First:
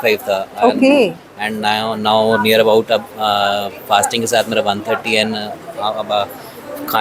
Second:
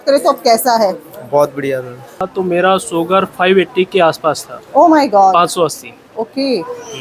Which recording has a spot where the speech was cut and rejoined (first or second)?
second